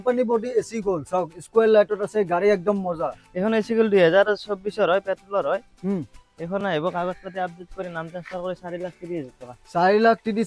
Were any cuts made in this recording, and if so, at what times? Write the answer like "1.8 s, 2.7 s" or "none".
none